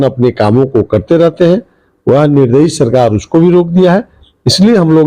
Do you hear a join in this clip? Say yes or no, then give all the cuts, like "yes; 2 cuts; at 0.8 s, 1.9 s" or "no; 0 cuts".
no; 0 cuts